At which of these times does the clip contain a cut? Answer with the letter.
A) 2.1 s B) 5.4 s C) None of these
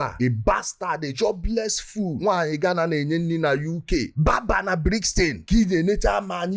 B